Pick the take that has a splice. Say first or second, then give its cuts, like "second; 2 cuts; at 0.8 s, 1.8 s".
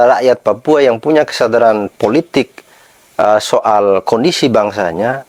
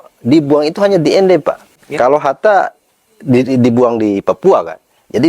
second; 1 cut; at 1.8 s